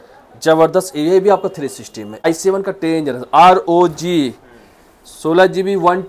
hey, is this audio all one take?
no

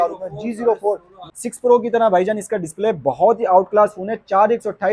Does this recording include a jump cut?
yes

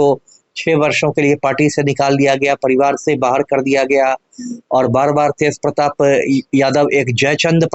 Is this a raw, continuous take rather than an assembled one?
yes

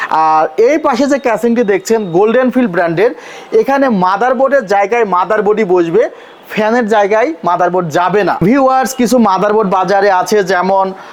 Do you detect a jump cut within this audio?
no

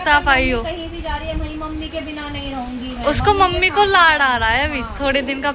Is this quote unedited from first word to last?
yes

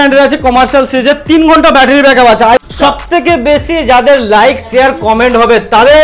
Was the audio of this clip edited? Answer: yes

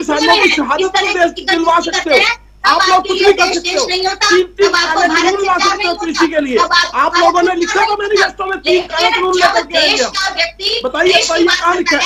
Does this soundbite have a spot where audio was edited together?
no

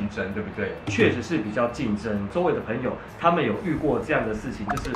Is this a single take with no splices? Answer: no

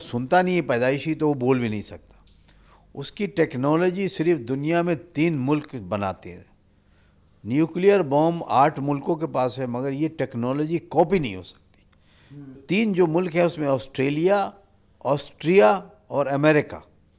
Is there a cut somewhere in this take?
yes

